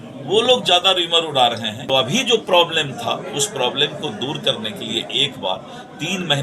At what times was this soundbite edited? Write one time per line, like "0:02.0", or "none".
0:02.1